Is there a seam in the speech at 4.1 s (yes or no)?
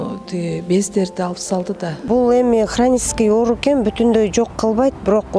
no